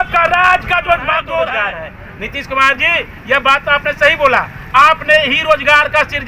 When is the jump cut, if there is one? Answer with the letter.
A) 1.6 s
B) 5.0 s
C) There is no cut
A